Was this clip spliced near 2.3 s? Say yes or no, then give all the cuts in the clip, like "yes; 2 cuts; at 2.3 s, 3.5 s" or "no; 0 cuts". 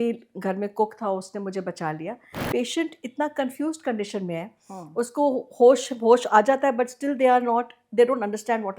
yes; 1 cut; at 2.3 s